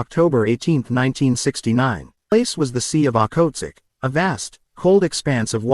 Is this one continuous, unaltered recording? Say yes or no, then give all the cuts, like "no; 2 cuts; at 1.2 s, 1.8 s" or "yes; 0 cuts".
no; 1 cut; at 2.3 s